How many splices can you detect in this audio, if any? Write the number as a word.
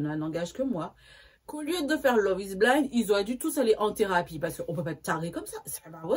zero